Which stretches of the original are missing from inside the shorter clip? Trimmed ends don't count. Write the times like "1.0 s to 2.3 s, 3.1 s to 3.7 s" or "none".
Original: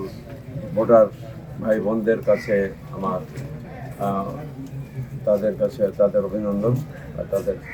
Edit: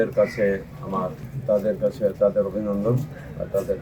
3.4 s to 5.0 s